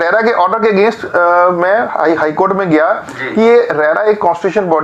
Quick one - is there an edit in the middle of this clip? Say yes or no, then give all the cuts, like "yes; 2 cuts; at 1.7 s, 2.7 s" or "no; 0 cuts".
no; 0 cuts